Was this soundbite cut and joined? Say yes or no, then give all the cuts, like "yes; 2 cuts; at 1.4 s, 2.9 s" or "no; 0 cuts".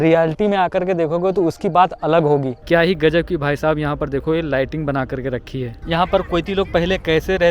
yes; 2 cuts; at 2.6 s, 5.7 s